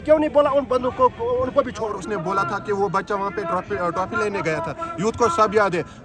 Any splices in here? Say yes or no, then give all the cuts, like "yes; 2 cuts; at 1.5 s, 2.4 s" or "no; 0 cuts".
yes; 1 cut; at 1.9 s